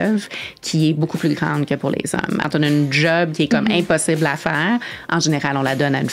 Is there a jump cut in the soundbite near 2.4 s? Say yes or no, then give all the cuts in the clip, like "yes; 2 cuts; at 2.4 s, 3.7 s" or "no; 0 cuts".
yes; 1 cut; at 2.4 s